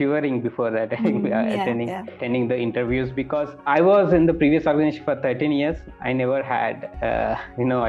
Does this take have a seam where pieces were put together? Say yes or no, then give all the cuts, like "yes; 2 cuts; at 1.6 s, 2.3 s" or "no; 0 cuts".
yes; 2 cuts; at 2.1 s, 3.7 s